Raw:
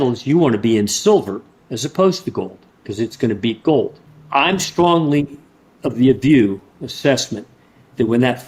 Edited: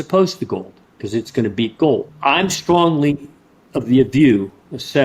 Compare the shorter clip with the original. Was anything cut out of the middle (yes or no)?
yes